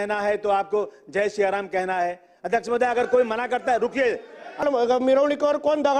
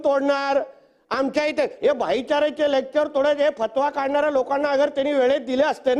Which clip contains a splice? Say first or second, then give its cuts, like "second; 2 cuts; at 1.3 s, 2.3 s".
first; 1 cut; at 4.6 s